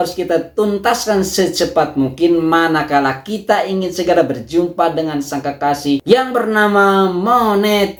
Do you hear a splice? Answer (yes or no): no